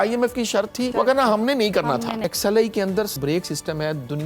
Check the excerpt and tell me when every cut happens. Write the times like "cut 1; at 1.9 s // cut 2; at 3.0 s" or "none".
cut 1; at 0.9 s // cut 2; at 2.3 s // cut 3; at 3.2 s